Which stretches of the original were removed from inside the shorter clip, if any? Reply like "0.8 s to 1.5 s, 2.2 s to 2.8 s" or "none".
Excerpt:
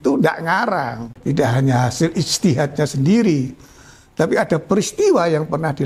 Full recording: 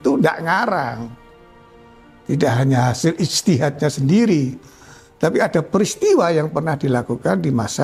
1.1 s to 2.1 s